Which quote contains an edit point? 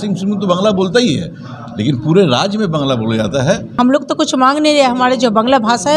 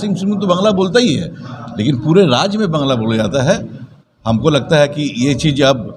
first; 1 cut; at 3.7 s

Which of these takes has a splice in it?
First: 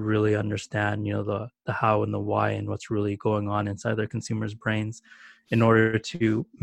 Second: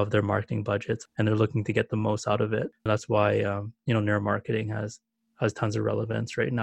second; 2 cuts; at 1.1 s, 2.8 s

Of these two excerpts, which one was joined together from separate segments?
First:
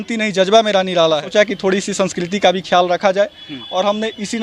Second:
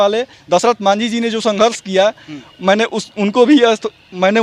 first; 1 cut; at 1.2 s

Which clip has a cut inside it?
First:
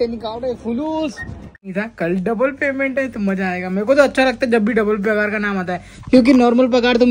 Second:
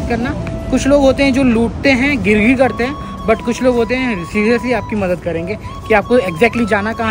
first; 1 cut; at 1.7 s

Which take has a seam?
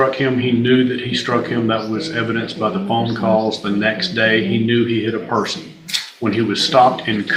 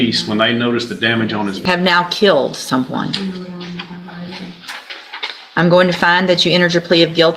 second; 1 cut; at 1.6 s

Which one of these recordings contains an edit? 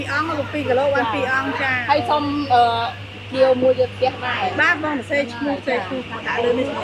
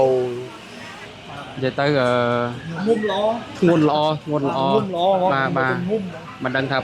second; 1 cut; at 1.0 s

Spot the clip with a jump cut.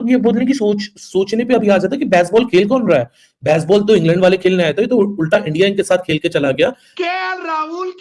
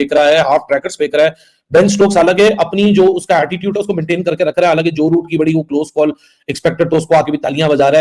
first; 1 cut; at 6.9 s

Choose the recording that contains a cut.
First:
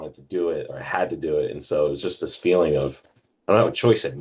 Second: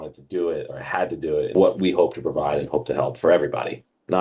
second; 1 cut; at 1.5 s

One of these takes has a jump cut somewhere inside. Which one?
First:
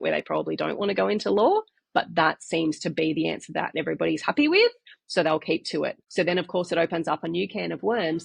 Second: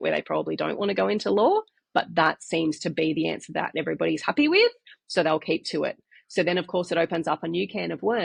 first; 1 cut; at 6.0 s

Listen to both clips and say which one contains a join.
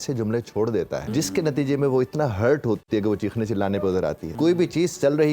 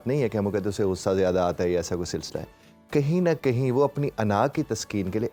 first; 3 cuts; at 1.1 s, 2.8 s, 4.2 s

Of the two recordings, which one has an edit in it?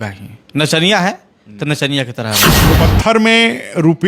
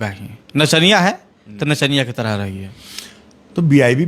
first; 1 cut; at 2.7 s

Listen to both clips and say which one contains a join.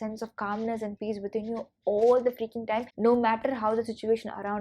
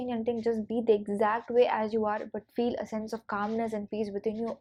first; 1 cut; at 2.9 s

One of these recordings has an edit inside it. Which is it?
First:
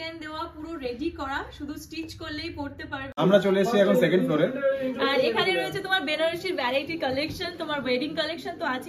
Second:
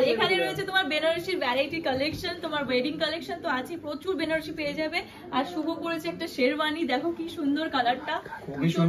first; 1 cut; at 3.0 s

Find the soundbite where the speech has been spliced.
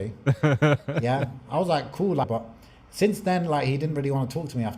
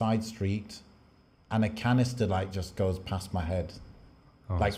first; 1 cut; at 2.3 s

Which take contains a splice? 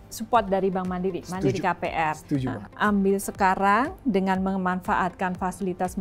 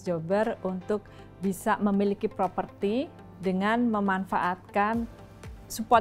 first; 1 cut; at 2.6 s

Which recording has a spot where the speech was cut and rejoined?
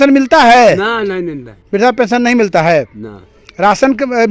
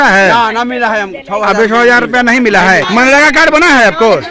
second; 1 cut; at 2.9 s

